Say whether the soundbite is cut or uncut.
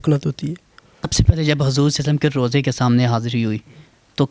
cut